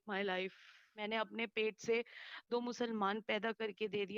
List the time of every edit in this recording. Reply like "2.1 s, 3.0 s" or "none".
0.9 s

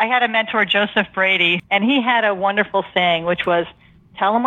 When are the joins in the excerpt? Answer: 1.5 s

